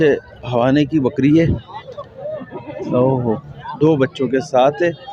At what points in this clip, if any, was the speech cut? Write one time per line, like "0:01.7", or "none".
none

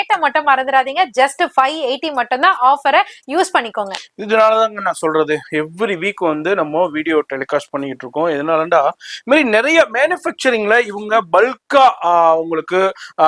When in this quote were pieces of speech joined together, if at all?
none

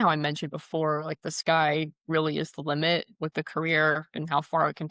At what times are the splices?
none

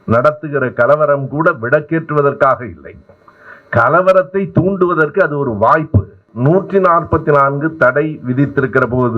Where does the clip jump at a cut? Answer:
0:06.3

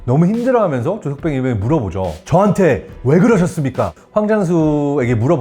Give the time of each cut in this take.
0:02.2
0:04.0

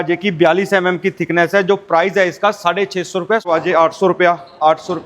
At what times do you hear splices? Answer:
0:03.5

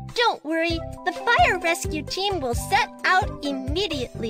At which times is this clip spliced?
none

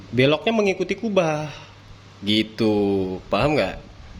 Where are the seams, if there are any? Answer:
none

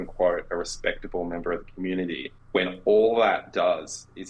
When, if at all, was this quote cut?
0:02.3

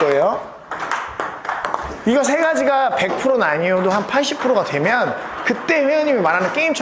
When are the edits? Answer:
none

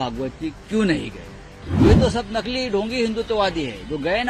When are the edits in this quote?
0:01.9

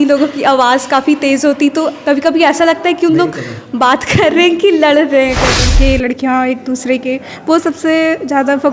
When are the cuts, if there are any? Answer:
0:05.6

